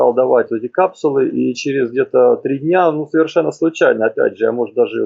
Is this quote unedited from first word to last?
yes; 0 cuts

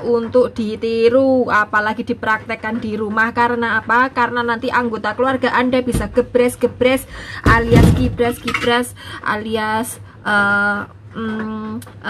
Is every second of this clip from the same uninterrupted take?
yes; 0 cuts

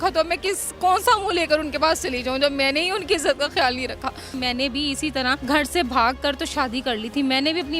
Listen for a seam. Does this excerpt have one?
yes; 2 cuts; at 4.3 s, 5.4 s

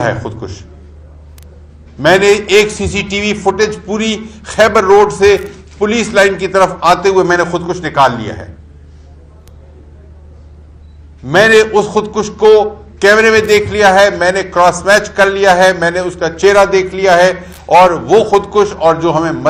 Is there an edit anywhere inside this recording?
no; 0 cuts

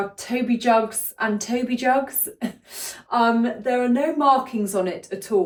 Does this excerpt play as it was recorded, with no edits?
yes; 0 cuts

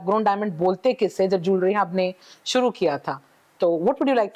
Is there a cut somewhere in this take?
no; 0 cuts

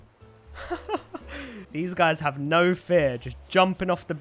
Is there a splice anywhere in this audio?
no; 0 cuts

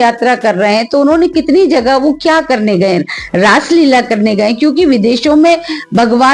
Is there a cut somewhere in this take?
no; 0 cuts

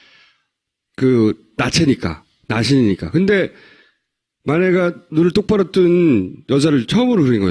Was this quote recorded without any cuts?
no; 1 cut; at 6.3 s

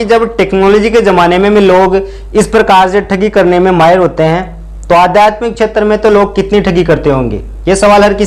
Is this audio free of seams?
yes; 0 cuts

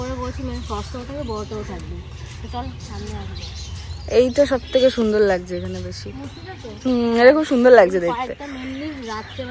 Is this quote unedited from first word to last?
yes; 0 cuts

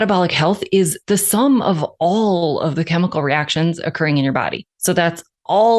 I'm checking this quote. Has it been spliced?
yes; 2 cuts; at 1.0 s, 4.7 s

